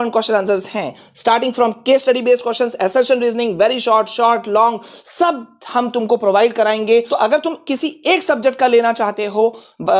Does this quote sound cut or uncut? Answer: cut